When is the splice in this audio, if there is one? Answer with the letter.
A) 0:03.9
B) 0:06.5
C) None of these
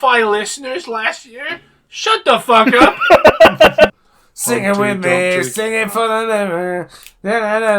A